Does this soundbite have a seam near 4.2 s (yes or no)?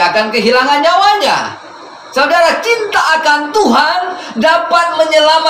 no